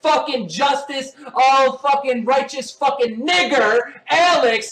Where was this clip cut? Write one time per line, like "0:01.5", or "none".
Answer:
none